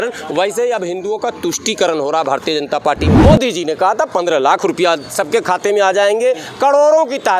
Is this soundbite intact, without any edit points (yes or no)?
no